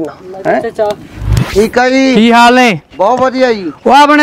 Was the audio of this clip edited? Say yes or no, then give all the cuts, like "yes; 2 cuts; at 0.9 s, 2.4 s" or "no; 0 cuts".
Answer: yes; 1 cut; at 1.4 s